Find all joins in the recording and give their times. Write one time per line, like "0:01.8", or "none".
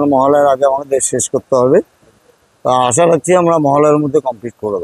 none